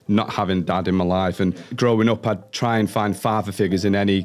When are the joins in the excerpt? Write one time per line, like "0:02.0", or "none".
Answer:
0:01.5

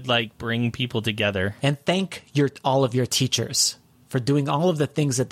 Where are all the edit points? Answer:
0:01.7

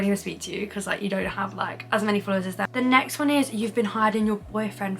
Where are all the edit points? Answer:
0:02.7

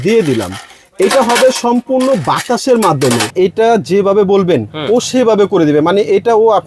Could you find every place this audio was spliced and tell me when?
0:03.3

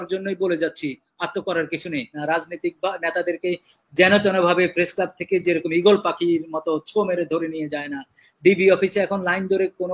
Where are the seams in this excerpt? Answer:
0:02.2

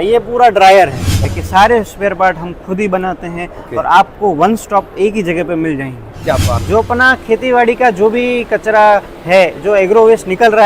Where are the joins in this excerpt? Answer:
0:01.3
0:06.4

